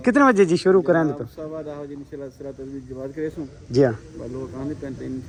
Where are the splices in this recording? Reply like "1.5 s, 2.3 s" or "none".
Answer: none